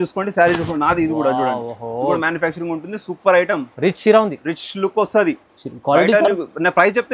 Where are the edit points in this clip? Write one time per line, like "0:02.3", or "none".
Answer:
none